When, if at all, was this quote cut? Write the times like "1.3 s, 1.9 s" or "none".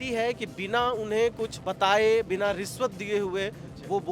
1.6 s